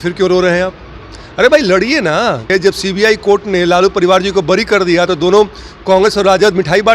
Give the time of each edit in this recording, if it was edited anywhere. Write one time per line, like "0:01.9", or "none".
0:02.5